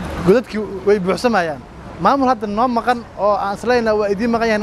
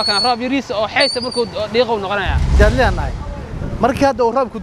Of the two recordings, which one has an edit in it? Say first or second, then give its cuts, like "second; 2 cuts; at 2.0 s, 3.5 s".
second; 1 cut; at 2.5 s